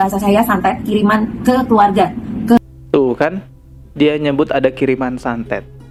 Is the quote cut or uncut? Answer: uncut